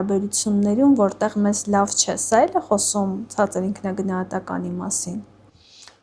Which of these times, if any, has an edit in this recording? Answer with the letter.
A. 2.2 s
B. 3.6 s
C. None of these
C